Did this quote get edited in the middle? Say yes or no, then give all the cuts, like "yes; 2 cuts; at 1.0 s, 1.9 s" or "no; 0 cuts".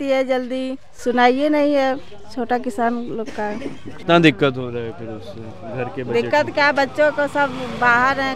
yes; 1 cut; at 4.0 s